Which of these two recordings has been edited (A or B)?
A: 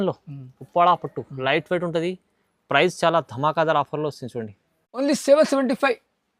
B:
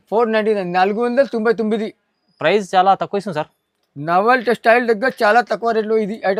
A